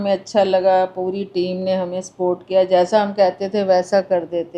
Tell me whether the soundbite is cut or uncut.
uncut